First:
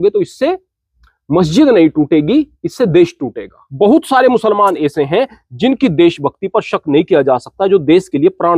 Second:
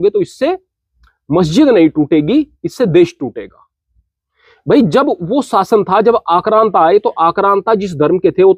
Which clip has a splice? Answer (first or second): first